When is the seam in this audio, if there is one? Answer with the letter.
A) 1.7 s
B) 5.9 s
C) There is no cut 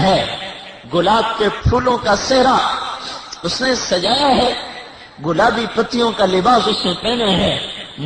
A